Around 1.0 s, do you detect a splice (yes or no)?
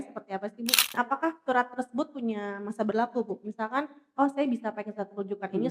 yes